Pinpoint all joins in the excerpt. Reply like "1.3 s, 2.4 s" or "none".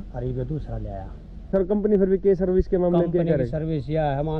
1.5 s